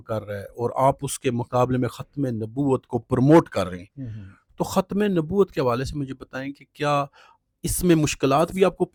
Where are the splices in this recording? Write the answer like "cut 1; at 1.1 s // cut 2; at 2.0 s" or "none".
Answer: none